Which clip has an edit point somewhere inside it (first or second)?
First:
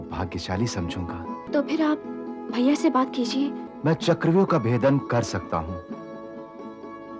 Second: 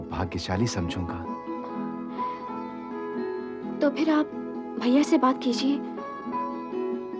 first